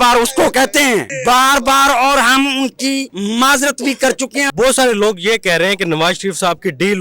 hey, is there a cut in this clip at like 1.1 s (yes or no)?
yes